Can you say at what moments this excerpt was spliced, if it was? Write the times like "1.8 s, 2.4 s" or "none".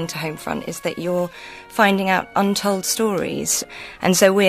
3.4 s